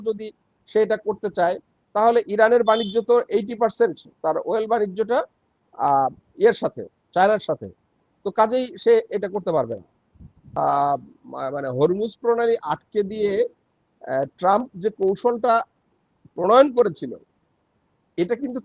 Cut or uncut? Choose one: cut